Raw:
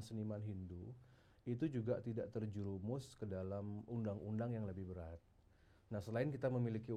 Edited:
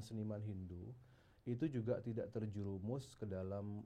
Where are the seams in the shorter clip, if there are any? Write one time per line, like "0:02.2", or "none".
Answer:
none